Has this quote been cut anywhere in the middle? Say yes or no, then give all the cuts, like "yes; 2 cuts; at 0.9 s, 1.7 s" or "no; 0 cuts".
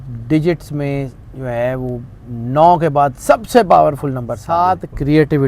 yes; 1 cut; at 4.4 s